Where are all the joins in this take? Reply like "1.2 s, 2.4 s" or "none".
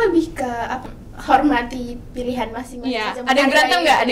0.9 s